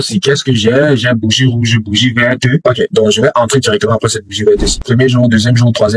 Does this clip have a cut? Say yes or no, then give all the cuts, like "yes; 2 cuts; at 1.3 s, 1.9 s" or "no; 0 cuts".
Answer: yes; 1 cut; at 4.8 s